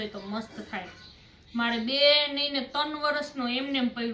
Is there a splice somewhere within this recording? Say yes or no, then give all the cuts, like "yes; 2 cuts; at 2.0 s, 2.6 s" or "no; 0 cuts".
no; 0 cuts